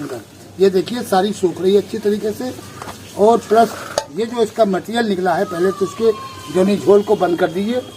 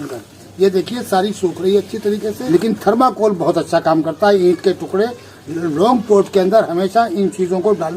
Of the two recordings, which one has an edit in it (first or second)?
second